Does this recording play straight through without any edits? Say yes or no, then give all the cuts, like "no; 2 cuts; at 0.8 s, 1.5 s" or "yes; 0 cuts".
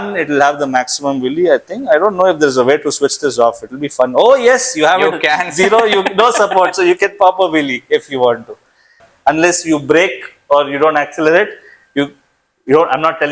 no; 1 cut; at 9.0 s